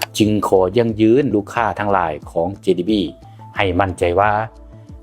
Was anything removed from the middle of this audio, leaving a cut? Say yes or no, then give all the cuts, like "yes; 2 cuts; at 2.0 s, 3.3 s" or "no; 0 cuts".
yes; 1 cut; at 1.3 s